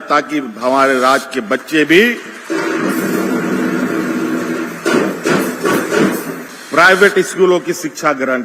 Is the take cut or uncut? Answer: uncut